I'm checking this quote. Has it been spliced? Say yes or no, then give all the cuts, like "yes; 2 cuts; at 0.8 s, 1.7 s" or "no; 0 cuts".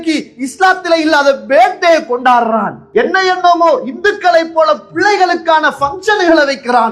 no; 0 cuts